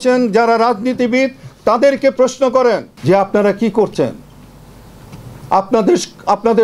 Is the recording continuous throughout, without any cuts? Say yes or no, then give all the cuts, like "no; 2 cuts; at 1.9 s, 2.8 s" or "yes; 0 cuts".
no; 1 cut; at 2.9 s